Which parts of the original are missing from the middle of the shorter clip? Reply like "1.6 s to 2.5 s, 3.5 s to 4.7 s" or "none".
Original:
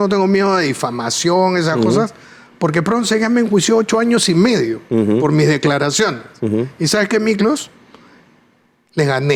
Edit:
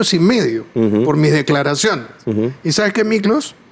none